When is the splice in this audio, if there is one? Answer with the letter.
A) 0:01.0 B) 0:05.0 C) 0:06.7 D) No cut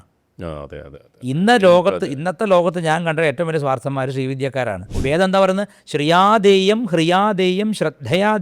B